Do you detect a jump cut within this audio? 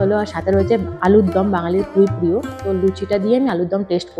no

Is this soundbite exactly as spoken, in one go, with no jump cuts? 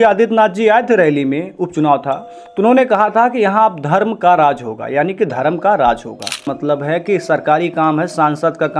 no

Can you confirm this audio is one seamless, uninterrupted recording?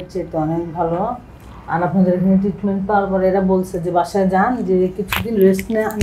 yes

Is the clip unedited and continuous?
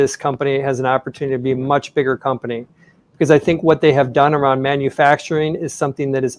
yes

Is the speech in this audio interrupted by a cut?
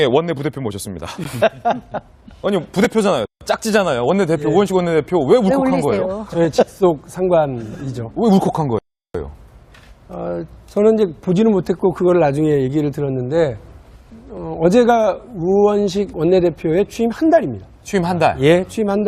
no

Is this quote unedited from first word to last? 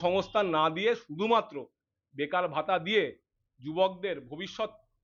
yes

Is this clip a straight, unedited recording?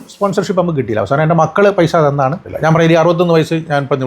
no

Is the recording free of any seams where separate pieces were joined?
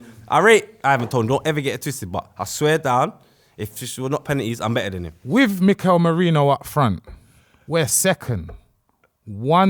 no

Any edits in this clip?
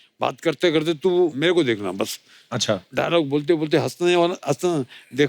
yes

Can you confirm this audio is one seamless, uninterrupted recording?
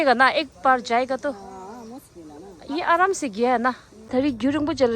no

